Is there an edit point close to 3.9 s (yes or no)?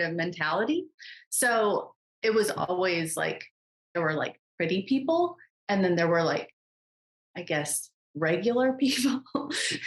yes